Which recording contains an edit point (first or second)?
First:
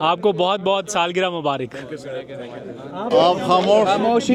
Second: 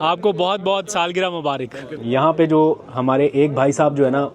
second